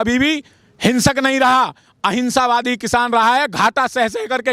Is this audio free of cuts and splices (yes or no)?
yes